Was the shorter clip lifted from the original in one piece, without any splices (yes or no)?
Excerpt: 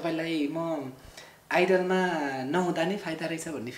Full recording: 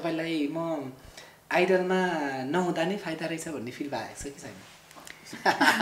yes